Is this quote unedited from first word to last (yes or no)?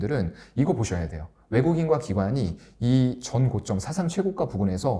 yes